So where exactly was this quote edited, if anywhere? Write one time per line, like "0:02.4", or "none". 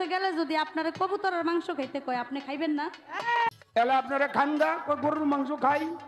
0:03.5